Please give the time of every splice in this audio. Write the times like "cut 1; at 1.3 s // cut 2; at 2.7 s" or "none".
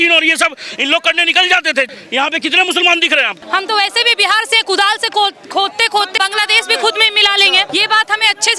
cut 1; at 1.9 s // cut 2; at 3.3 s // cut 3; at 6.2 s // cut 4; at 7.7 s